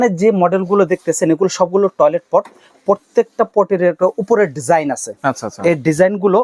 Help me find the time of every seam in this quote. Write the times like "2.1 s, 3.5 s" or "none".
none